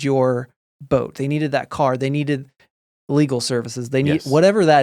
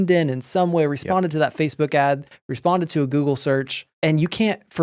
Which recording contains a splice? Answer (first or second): second